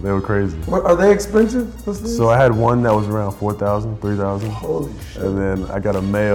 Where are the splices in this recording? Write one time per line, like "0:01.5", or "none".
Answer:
none